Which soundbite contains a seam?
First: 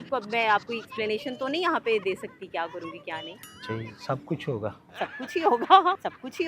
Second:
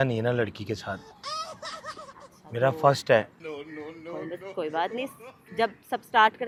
first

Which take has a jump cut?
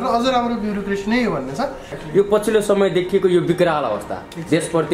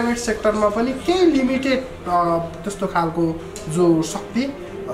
first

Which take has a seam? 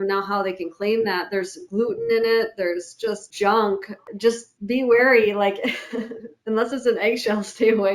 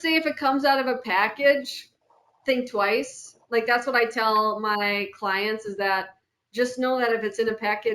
first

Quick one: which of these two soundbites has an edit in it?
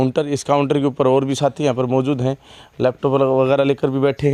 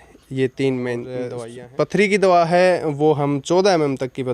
second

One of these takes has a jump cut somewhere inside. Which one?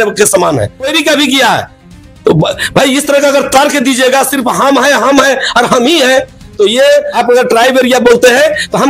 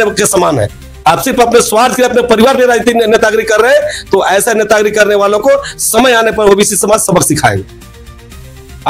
first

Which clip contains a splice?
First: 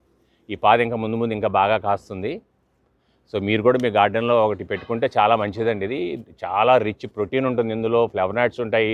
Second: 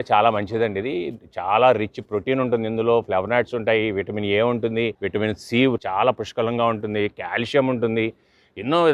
second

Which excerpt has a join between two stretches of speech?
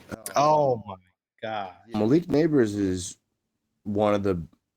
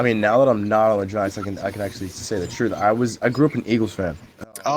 first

